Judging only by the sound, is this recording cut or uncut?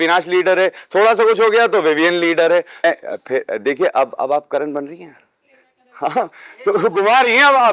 cut